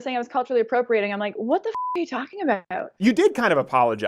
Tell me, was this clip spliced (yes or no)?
yes